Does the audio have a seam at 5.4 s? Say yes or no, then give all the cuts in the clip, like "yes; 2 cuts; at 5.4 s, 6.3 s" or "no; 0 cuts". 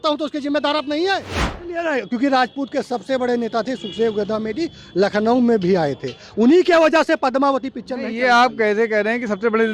no; 1 cut; at 1.8 s